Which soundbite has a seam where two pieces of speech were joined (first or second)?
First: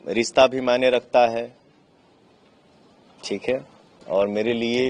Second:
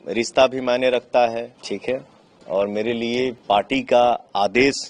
second